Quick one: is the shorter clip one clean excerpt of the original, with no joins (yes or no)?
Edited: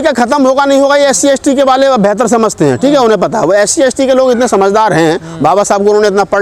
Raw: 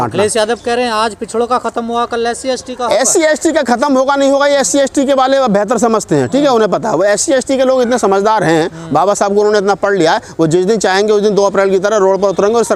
yes